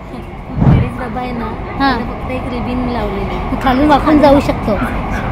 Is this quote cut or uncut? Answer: uncut